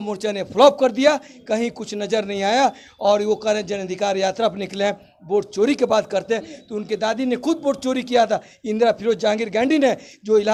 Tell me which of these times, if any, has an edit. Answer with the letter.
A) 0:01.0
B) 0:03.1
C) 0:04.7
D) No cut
D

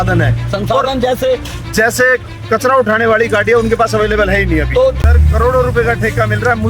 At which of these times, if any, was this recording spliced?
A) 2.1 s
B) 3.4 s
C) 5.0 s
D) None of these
C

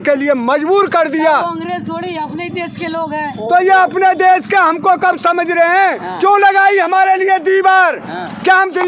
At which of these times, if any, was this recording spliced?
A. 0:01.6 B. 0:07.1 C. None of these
C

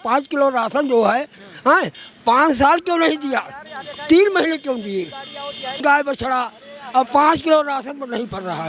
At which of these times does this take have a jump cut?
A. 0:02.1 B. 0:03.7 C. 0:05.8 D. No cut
C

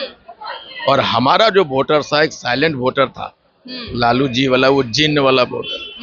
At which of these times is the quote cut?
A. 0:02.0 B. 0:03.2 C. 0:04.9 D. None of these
D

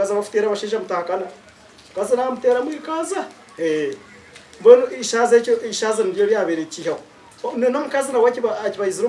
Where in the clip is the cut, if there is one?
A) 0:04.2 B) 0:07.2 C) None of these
C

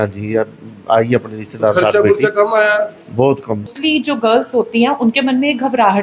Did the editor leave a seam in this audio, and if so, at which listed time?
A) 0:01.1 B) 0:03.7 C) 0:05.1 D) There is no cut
B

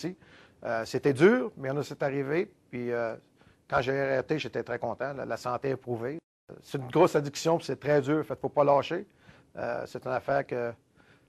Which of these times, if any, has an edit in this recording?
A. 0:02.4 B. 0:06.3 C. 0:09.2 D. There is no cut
D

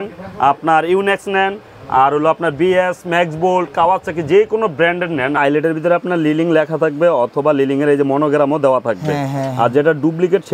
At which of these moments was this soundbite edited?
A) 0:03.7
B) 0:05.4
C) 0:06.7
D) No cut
B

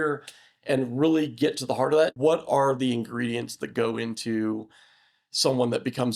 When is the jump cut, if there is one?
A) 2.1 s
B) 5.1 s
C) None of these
A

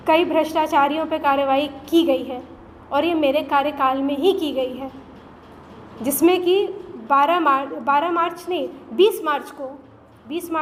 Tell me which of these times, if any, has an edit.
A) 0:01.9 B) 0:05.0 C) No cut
C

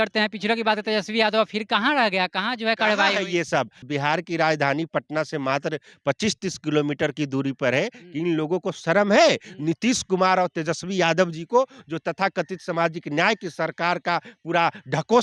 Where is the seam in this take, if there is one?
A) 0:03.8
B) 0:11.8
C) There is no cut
A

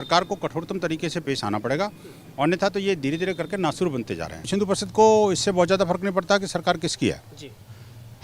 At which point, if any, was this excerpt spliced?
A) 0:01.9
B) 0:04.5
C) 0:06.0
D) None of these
B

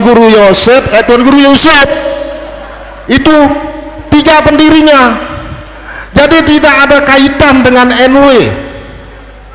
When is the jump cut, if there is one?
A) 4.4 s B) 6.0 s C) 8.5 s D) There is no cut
D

